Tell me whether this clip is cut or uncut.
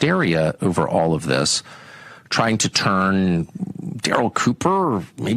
uncut